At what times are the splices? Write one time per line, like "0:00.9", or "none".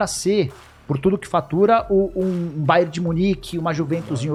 none